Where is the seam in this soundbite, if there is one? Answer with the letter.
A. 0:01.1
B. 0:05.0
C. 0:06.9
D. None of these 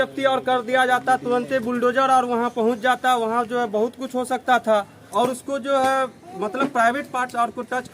B